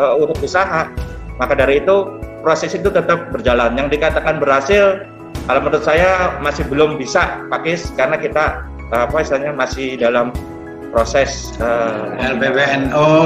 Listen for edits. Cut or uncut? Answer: cut